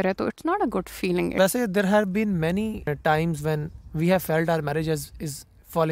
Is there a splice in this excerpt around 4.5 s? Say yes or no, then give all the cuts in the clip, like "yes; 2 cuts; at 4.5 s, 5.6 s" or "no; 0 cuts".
no; 2 cuts; at 1.3 s, 2.9 s